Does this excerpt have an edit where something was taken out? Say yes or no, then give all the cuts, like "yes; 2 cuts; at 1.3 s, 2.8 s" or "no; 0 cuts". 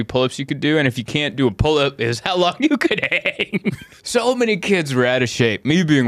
yes; 1 cut; at 3.9 s